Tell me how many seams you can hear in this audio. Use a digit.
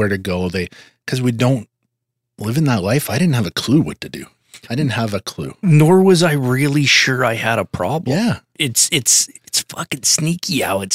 1